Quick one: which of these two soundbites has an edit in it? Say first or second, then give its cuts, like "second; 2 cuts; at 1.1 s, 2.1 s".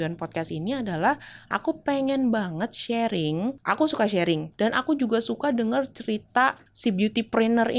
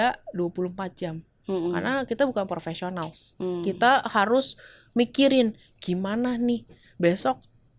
first; 3 cuts; at 3.6 s, 4.5 s, 6.7 s